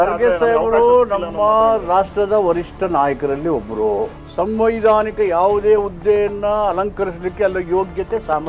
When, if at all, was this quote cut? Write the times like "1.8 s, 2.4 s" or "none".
4.2 s

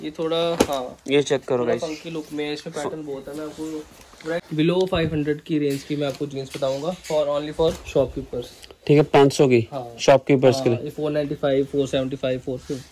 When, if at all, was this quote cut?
4.4 s

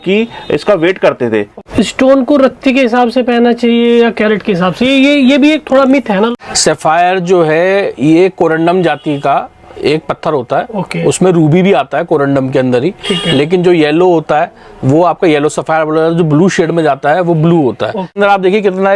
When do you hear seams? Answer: 1.6 s, 6.3 s, 18.2 s

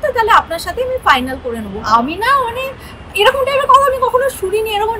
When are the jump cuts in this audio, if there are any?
1.8 s

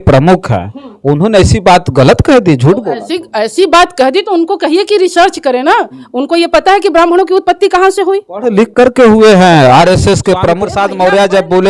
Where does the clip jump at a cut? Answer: 10.7 s

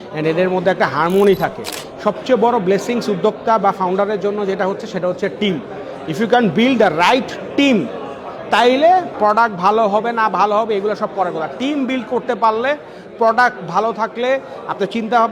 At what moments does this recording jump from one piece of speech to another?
1.8 s, 9.1 s

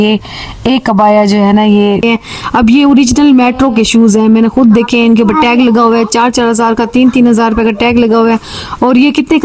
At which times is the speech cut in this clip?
2.0 s

